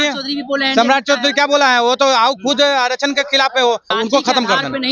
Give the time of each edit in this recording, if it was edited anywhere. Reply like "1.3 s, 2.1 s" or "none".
3.9 s